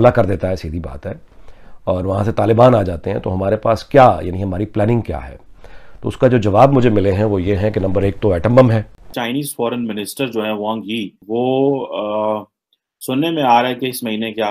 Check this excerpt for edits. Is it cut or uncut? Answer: cut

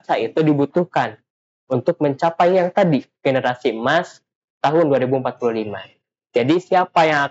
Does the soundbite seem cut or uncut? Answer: uncut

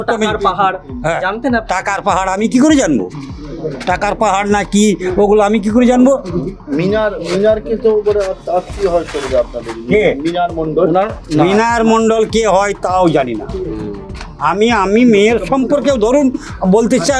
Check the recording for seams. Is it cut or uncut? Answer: uncut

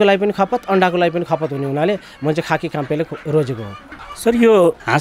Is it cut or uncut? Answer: uncut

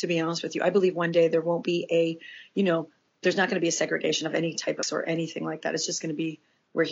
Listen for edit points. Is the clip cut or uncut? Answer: cut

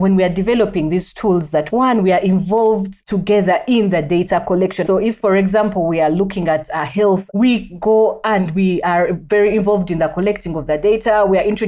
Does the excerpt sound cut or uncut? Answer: cut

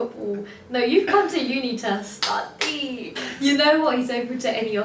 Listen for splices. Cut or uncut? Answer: cut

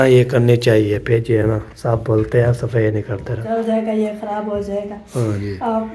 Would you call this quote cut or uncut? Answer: cut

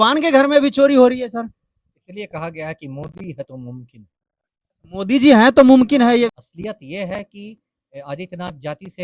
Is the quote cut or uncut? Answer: cut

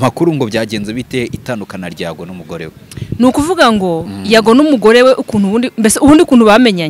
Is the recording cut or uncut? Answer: uncut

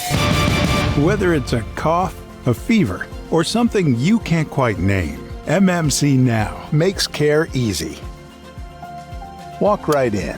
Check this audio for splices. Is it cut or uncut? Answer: cut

